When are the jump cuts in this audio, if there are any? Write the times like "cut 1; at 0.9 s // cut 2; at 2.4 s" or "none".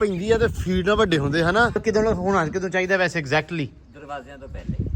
cut 1; at 1.8 s

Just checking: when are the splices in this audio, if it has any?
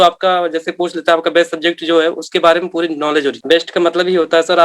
cut 1; at 3.4 s

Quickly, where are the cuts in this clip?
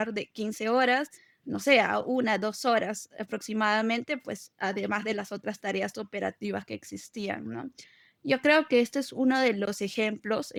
none

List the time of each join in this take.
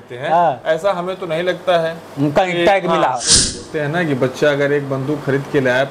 cut 1; at 3.6 s

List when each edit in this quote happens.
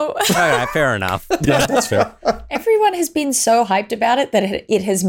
cut 1; at 2.6 s

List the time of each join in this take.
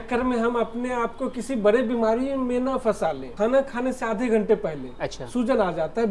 cut 1; at 3.3 s

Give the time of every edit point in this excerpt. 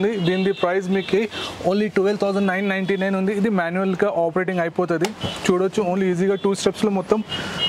none

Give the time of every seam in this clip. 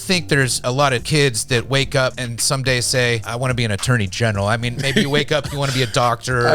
cut 1; at 0.8 s // cut 2; at 2.3 s // cut 3; at 3.3 s

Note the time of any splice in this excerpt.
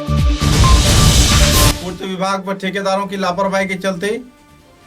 cut 1; at 1.8 s

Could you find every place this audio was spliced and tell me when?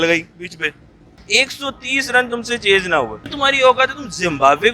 cut 1; at 1.1 s // cut 2; at 3.3 s

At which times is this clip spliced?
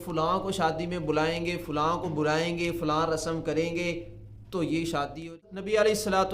cut 1; at 5.4 s

